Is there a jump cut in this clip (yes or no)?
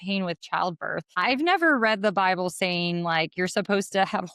yes